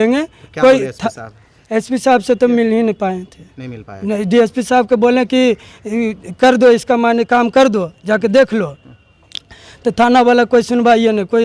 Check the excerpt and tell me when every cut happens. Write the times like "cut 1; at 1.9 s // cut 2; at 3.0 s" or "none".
none